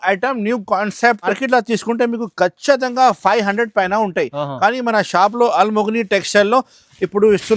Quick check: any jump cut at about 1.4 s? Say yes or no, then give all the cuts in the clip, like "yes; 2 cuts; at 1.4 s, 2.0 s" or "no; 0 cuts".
yes; 1 cut; at 1.4 s